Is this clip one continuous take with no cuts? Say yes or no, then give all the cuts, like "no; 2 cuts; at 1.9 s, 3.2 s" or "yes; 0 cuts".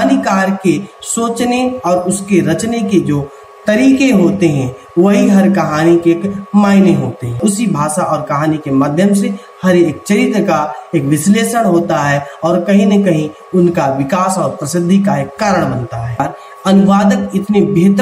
no; 2 cuts; at 7.4 s, 16.2 s